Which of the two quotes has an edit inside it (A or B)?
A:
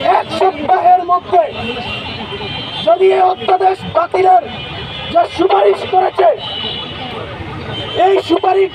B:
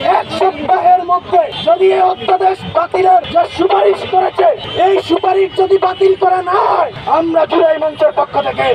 B